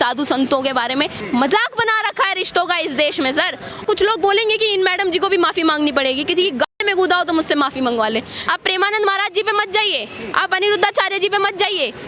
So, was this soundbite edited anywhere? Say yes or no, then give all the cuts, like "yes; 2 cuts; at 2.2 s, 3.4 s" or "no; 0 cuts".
yes; 3 cuts; at 1.2 s, 3.8 s, 8.4 s